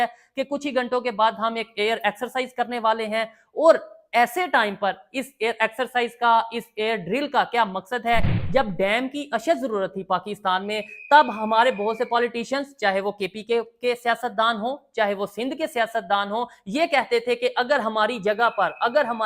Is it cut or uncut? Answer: cut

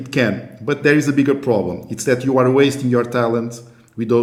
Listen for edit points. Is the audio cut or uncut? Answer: uncut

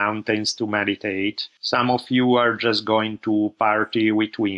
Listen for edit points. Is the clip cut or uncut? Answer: cut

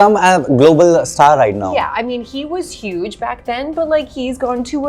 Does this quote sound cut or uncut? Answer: uncut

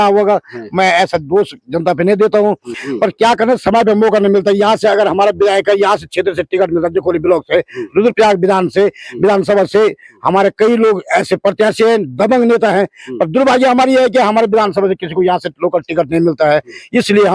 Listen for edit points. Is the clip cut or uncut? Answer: cut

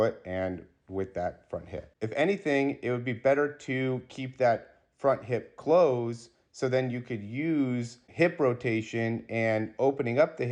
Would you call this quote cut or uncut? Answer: cut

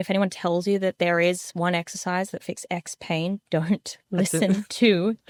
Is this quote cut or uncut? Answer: uncut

